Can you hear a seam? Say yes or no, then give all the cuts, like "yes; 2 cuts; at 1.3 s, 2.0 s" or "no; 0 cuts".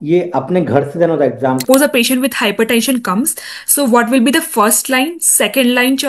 yes; 1 cut; at 1.6 s